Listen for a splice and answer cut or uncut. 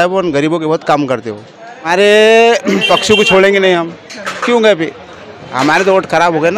cut